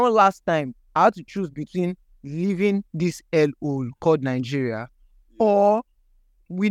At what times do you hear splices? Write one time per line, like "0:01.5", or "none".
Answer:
none